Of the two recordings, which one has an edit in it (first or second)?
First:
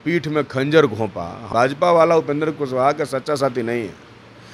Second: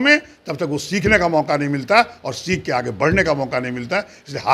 first